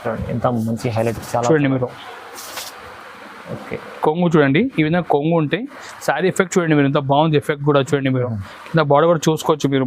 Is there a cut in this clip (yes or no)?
no